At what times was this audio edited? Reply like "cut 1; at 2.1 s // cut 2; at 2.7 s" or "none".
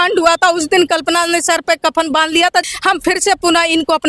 cut 1; at 2.7 s